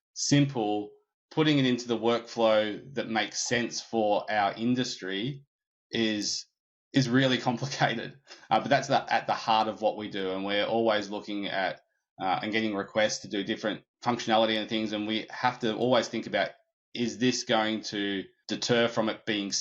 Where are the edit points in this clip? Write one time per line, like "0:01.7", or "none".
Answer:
0:13.9
0:18.4